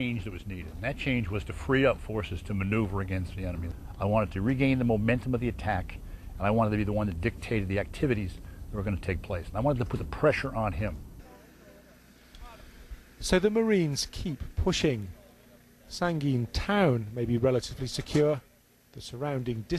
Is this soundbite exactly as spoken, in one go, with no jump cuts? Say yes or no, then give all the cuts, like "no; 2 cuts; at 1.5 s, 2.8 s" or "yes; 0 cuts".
no; 1 cut; at 12.8 s